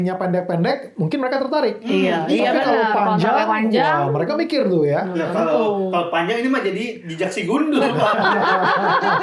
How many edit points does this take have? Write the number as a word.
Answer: zero